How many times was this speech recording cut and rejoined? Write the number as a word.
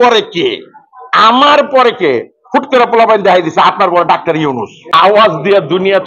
one